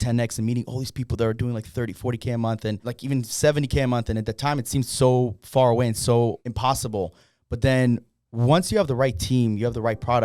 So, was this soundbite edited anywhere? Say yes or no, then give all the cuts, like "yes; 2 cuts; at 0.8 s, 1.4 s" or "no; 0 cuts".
yes; 2 cuts; at 2.9 s, 6.4 s